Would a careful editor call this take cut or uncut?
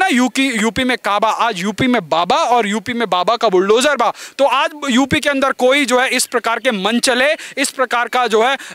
uncut